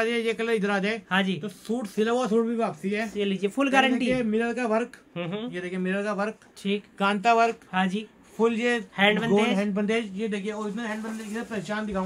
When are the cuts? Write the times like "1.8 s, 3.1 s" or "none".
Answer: none